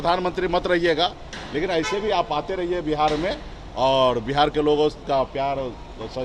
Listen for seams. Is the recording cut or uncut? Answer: uncut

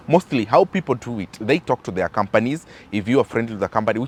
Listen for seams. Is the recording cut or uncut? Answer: uncut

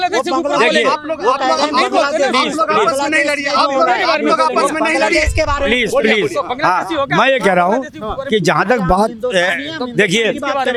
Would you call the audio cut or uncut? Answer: uncut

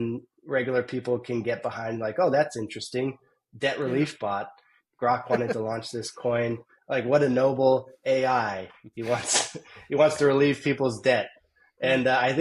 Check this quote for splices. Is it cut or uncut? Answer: uncut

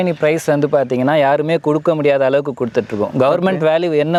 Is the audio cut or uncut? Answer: uncut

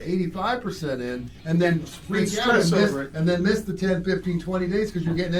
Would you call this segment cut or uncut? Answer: uncut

